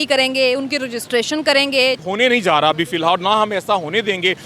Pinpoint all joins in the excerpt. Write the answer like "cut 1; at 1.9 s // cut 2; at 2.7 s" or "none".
cut 1; at 2.0 s